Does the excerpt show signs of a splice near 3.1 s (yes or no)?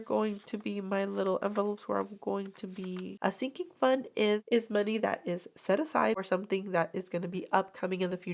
yes